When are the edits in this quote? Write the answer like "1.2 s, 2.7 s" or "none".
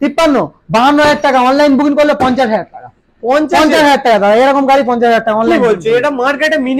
none